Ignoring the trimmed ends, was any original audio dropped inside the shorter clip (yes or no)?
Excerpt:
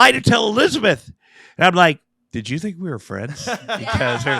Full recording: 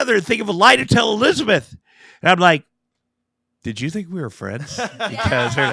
yes